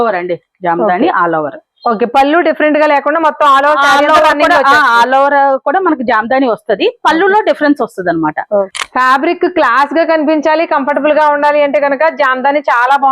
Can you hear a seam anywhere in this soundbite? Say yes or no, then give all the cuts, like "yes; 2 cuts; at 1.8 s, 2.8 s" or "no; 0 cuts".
yes; 1 cut; at 8.8 s